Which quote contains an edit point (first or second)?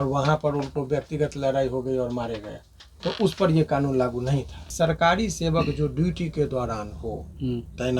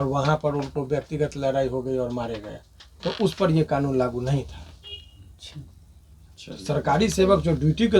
first